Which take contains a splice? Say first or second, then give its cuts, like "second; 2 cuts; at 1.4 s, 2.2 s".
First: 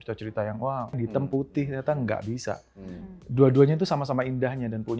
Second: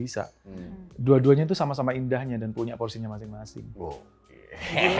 first; 1 cut; at 1.0 s